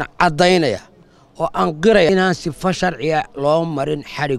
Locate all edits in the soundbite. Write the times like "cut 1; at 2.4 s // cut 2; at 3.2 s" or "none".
cut 1; at 2.1 s